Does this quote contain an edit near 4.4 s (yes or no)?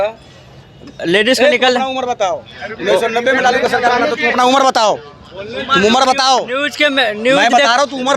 no